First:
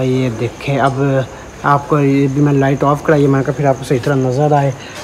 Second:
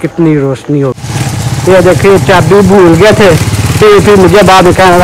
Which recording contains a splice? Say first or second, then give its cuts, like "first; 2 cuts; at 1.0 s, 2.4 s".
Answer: second; 1 cut; at 1.0 s